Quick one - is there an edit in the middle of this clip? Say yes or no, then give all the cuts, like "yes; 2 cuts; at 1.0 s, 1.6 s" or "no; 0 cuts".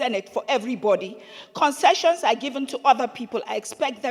no; 0 cuts